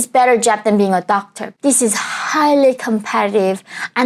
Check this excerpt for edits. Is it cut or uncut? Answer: cut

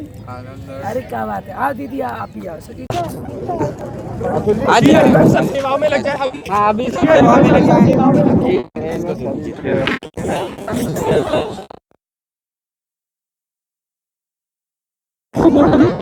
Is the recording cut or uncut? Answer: uncut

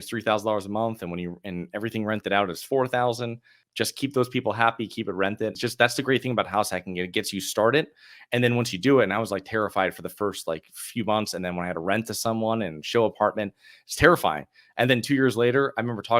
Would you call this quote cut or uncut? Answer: cut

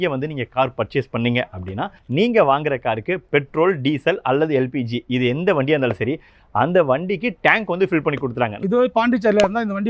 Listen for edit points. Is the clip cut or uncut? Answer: cut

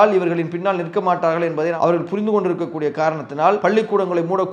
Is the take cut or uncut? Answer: cut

